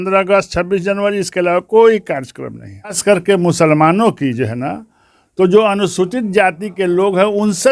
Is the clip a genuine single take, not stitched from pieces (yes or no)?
no